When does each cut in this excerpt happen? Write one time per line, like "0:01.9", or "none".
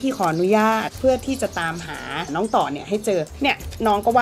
0:02.3
0:03.3